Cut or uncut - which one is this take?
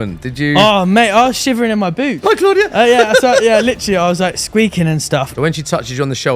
cut